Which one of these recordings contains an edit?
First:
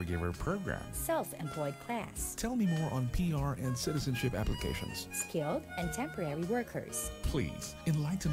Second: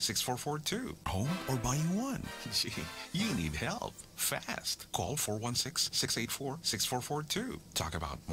second; 1 cut; at 1.1 s

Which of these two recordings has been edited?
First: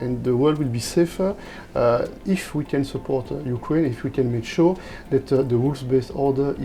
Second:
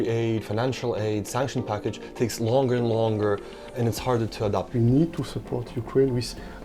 second; 1 cut; at 4.7 s

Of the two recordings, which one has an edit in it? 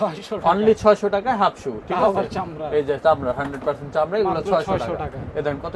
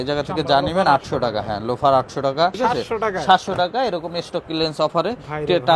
second; 1 cut; at 2.6 s

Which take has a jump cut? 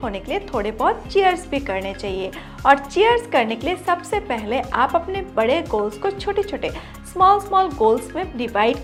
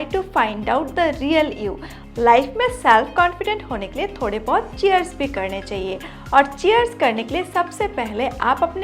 second; 1 cut; at 1.9 s

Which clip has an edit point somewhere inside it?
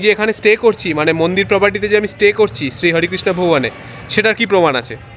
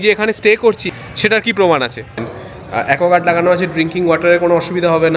second; 2 cuts; at 0.9 s, 2.3 s

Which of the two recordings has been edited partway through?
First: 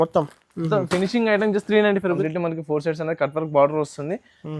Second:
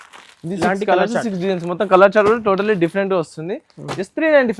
first; 1 cut; at 2.2 s

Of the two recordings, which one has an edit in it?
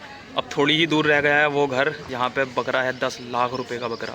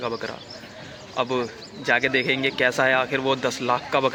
first; 1 cut; at 2.1 s

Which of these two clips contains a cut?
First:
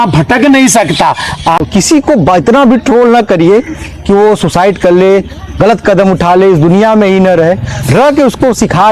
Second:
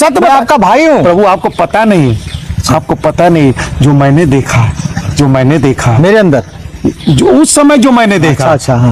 first; 1 cut; at 1.6 s

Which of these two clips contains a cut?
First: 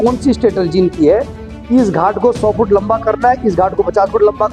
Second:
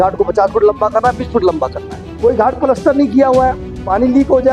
second; 1 cut; at 2.0 s

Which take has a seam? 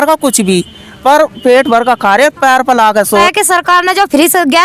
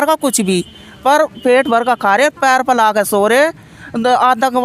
first; 1 cut; at 3.2 s

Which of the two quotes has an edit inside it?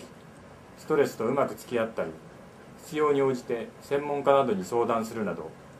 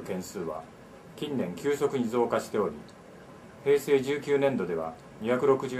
second; 1 cut; at 1.5 s

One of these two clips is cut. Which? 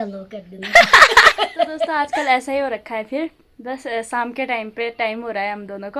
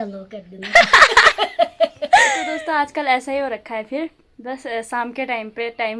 first; 1 cut; at 1.8 s

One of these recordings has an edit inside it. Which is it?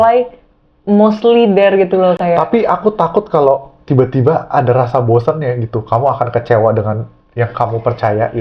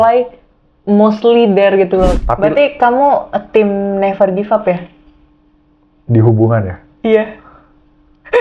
second; 1 cut; at 2.2 s

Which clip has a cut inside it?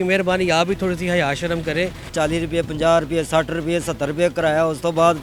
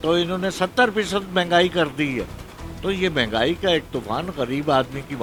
first; 1 cut; at 2.1 s

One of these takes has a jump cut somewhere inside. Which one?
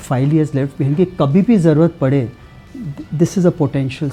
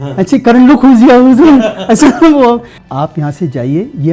second; 1 cut; at 2.8 s

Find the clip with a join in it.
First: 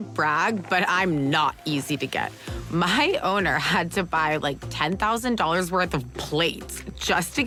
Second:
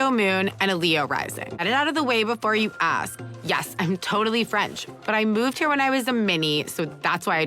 second; 1 cut; at 1.6 s

